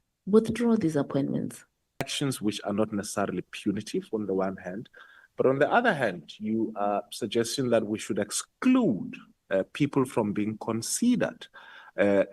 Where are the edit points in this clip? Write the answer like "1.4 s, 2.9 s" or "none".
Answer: 2.0 s